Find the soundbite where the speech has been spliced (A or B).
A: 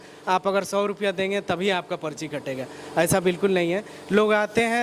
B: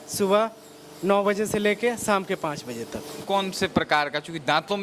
B